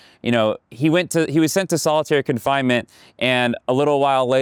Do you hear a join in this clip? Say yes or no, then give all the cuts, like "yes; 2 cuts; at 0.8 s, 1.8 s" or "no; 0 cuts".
no; 0 cuts